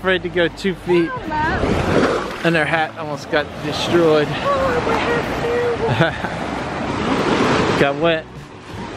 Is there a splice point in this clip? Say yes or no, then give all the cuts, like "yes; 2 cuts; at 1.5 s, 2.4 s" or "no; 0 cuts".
yes; 1 cut; at 6.9 s